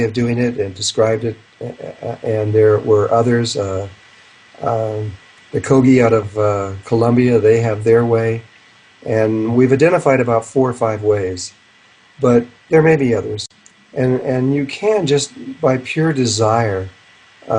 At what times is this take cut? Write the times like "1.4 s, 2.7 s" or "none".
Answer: 4.9 s